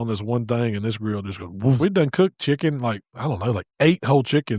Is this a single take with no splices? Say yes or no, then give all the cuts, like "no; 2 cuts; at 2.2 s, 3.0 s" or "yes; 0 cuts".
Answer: no; 1 cut; at 1.8 s